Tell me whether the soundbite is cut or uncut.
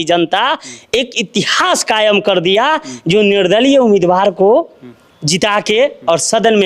uncut